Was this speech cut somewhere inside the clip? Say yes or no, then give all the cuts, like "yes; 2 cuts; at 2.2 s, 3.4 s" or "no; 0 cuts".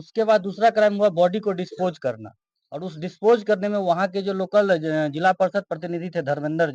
no; 0 cuts